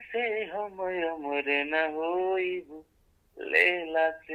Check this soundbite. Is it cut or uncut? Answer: uncut